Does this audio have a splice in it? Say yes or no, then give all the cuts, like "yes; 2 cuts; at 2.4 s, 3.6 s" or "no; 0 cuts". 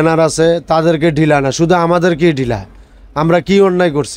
no; 0 cuts